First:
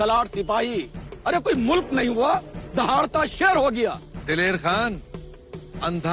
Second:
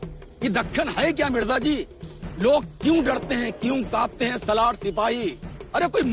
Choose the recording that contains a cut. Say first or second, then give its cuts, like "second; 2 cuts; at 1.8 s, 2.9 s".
first; 1 cut; at 4.1 s